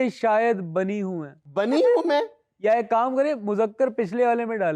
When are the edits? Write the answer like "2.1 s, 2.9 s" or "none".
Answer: 1.4 s